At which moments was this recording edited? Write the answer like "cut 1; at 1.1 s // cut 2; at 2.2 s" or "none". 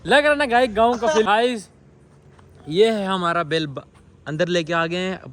cut 1; at 1.2 s